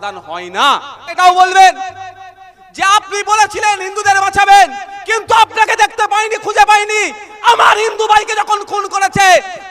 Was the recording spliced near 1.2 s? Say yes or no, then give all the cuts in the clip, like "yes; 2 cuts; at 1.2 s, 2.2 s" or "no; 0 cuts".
yes; 1 cut; at 1.2 s